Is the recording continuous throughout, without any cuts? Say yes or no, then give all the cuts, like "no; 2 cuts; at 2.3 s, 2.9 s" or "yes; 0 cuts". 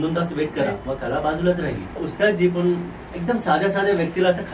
no; 2 cuts; at 0.8 s, 2.0 s